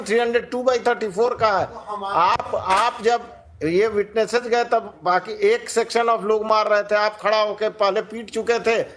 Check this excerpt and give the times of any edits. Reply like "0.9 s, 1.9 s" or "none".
none

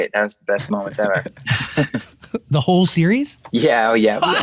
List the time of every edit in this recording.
3.4 s

